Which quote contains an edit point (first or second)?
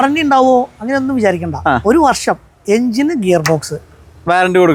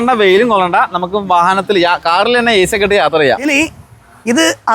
second